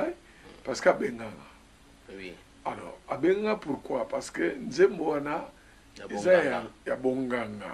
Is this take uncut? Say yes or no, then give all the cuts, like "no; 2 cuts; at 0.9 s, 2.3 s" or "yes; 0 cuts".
yes; 0 cuts